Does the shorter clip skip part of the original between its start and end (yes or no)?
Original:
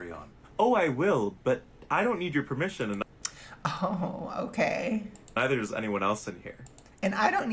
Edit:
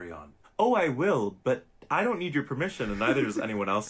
yes